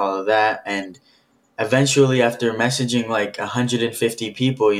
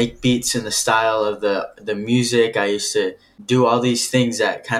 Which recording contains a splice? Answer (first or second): second